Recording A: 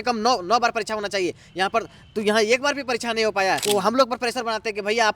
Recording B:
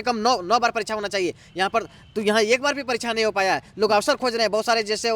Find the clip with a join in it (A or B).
A